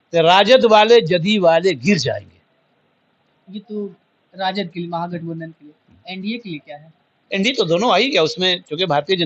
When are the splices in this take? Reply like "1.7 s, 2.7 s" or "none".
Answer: none